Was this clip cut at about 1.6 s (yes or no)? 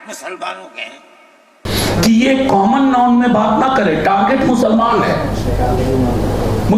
yes